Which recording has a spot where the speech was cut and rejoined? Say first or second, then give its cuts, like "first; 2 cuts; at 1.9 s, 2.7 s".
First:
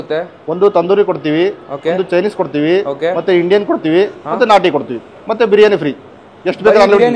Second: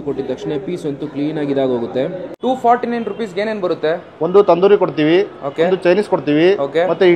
second; 1 cut; at 2.3 s